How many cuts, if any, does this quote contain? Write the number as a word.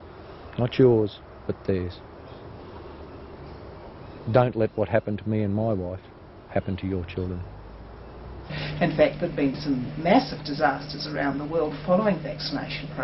one